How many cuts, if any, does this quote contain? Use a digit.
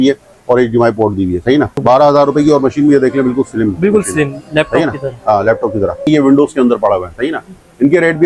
2